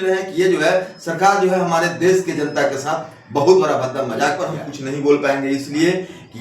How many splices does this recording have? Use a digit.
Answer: 1